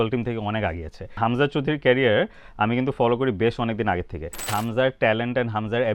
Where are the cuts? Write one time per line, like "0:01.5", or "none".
0:01.2
0:04.5